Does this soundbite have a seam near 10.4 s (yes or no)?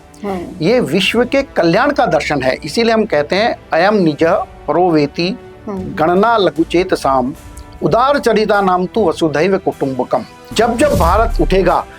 yes